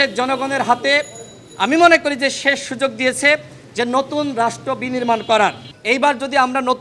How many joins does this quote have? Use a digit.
1